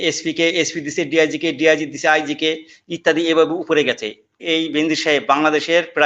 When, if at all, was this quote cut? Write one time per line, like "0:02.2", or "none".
0:04.4